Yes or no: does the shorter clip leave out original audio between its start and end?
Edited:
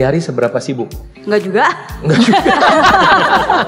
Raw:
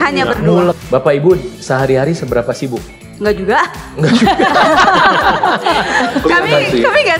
no